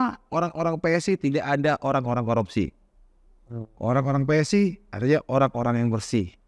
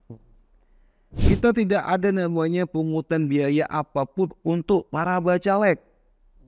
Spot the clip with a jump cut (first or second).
second